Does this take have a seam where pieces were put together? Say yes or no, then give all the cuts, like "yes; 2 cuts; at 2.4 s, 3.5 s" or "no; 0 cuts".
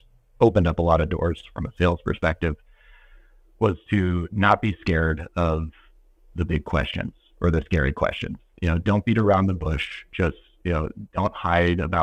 no; 0 cuts